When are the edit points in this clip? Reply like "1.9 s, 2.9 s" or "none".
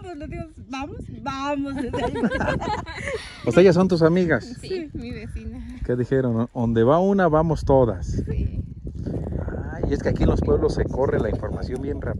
none